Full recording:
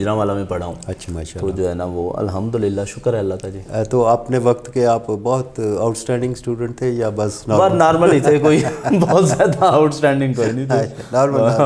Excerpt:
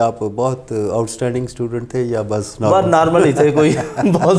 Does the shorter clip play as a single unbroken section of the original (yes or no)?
yes